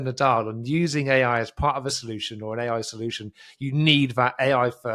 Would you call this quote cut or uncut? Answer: uncut